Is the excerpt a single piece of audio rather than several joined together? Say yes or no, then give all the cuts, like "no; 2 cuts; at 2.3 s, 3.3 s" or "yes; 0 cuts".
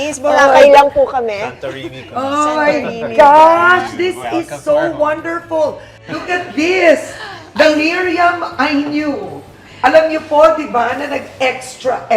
no; 1 cut; at 5.9 s